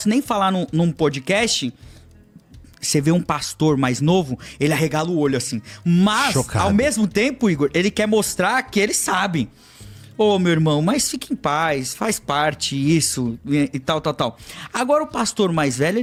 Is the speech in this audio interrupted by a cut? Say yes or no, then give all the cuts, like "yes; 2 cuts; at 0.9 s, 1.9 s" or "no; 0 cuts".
no; 0 cuts